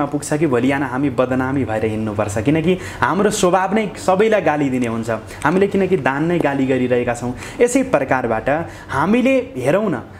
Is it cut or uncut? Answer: uncut